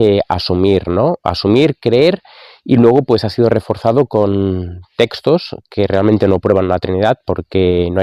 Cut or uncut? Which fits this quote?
uncut